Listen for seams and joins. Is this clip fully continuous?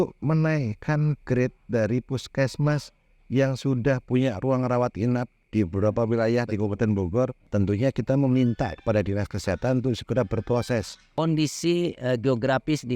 no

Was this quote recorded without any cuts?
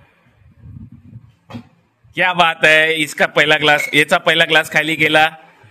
yes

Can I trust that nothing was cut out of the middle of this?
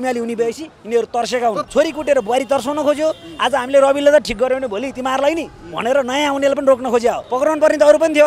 no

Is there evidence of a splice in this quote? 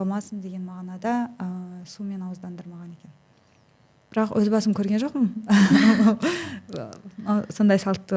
no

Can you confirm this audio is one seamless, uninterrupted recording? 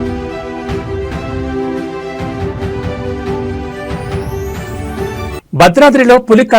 no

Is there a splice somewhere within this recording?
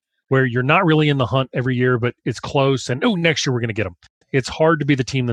yes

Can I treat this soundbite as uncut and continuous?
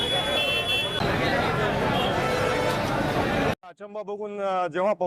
no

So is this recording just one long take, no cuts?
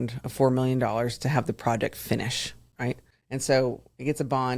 no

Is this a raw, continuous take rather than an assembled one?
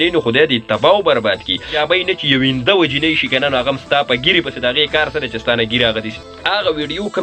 no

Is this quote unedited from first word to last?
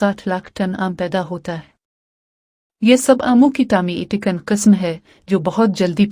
yes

